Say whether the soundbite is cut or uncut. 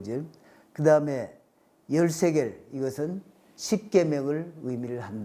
uncut